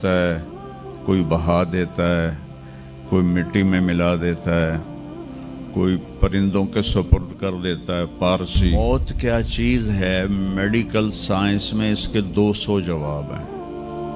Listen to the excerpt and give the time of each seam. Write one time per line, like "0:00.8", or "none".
0:08.7